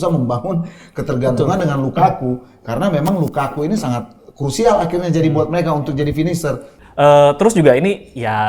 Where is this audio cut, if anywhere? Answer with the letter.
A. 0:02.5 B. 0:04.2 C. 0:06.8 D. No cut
C